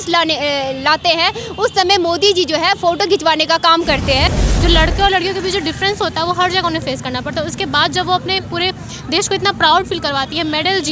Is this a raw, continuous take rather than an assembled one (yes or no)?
no